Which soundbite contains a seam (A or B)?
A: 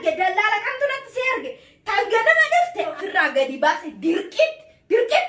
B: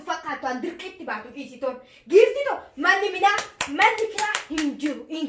A